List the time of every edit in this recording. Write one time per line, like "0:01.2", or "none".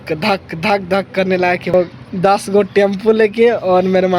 0:01.7